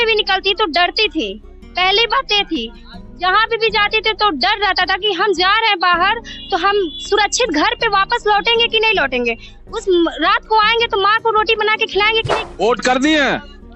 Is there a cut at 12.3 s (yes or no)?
yes